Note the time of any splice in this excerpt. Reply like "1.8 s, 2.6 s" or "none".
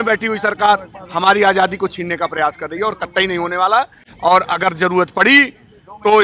none